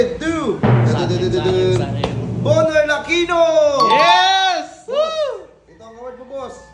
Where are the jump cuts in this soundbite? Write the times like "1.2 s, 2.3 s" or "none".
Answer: none